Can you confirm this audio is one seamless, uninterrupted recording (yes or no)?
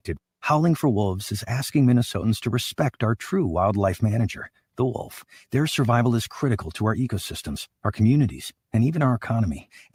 yes